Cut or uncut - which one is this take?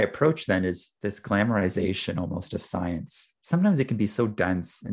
cut